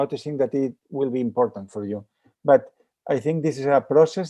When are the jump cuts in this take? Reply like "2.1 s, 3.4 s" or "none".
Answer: none